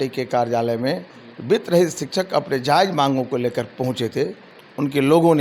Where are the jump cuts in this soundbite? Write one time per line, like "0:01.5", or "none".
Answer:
0:04.5